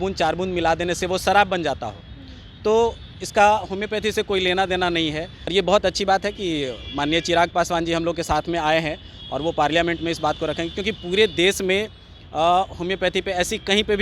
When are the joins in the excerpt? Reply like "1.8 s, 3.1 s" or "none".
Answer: 5.5 s

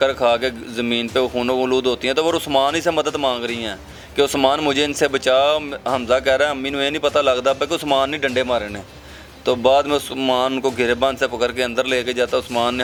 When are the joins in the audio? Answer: none

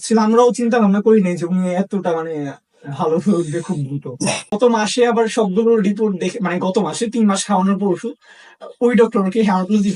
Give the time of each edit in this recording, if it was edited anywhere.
4.4 s

